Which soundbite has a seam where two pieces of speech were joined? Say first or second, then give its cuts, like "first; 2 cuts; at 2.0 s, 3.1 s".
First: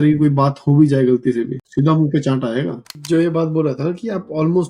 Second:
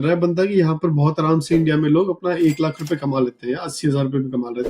first; 2 cuts; at 1.6 s, 3.0 s